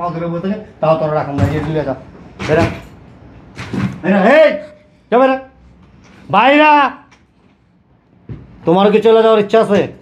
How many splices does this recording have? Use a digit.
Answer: 0